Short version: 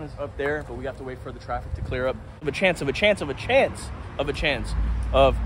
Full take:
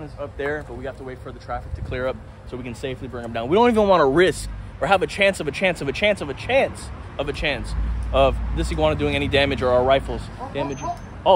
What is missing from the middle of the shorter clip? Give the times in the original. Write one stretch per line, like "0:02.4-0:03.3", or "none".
0:02.4-0:05.4